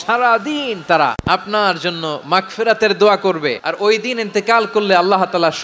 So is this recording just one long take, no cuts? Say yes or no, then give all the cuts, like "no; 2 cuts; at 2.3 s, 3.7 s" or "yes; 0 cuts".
no; 2 cuts; at 1.2 s, 3.6 s